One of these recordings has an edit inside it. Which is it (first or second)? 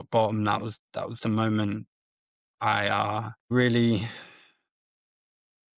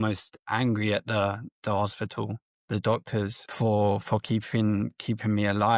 first